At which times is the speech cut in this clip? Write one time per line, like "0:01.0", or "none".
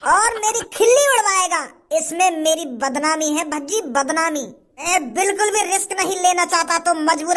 0:04.9